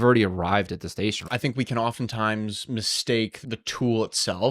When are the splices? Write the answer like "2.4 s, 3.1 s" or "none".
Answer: 1.2 s, 3.4 s

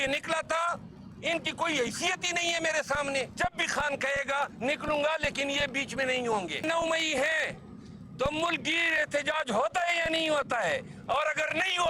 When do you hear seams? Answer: 3.3 s, 6.6 s

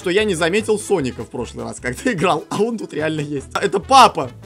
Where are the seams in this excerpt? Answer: 3.4 s

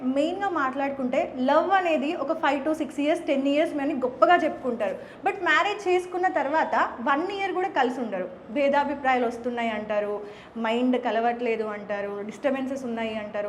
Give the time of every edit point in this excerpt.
none

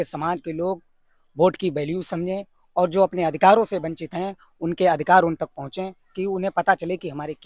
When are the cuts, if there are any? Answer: none

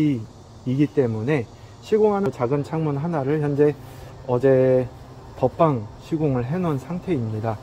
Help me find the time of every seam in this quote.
2.3 s

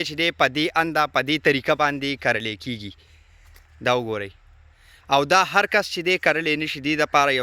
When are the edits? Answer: none

